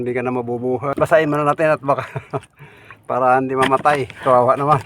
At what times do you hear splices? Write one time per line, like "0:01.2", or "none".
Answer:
0:00.9